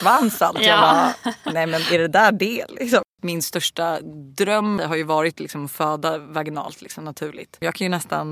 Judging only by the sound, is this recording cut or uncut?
cut